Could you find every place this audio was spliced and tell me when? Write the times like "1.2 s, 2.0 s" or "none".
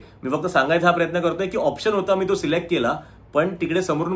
none

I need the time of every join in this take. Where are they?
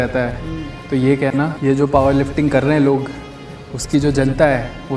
1.5 s

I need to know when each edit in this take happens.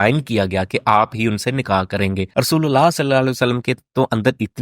2.3 s

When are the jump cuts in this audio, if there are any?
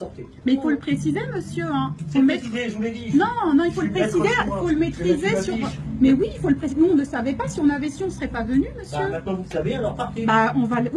2.5 s

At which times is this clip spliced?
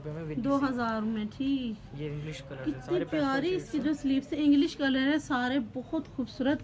none

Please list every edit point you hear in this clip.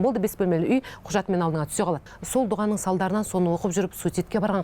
2.0 s

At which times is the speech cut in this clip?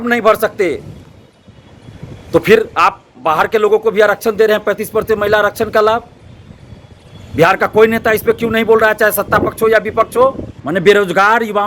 10.5 s

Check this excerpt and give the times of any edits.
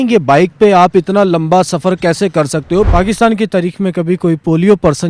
2.9 s

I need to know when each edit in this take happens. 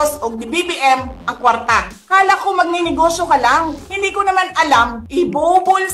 1.9 s, 3.8 s, 5.0 s

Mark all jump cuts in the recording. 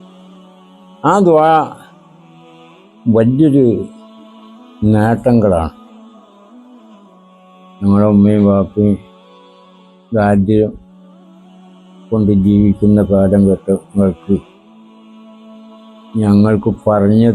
5.8 s, 7.8 s

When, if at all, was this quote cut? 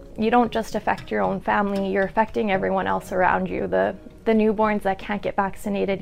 none

